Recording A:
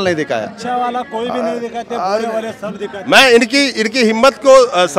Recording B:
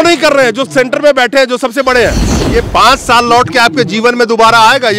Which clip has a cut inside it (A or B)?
B